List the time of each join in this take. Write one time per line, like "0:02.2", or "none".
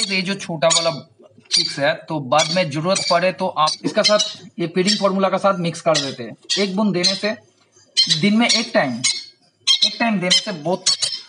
0:03.8